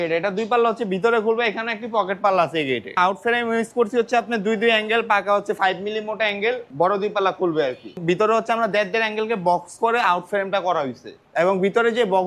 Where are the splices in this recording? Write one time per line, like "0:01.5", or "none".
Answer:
0:03.0
0:06.7
0:07.9
0:11.2